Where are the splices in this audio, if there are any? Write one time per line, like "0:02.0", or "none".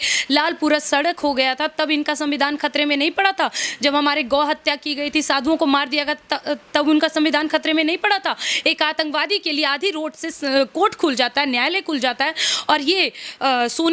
none

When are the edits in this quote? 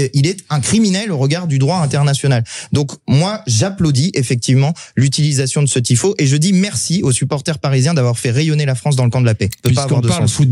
0:09.6

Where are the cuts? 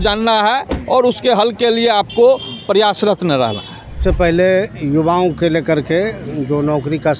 0:04.0

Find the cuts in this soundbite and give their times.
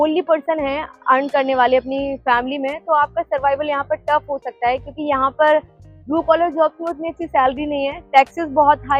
none

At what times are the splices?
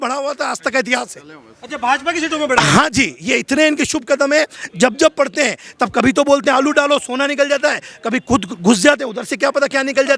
none

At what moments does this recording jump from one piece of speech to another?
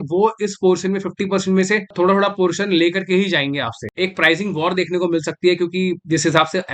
0:03.9

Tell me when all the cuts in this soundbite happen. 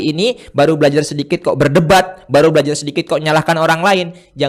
none

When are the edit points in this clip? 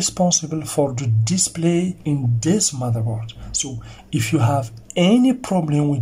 0:02.0

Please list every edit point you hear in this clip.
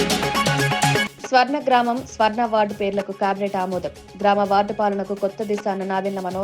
0:01.0

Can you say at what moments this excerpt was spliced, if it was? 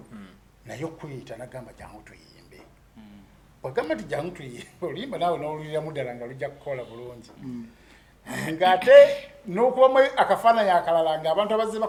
none

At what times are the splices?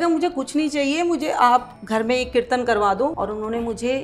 0:01.8
0:03.1

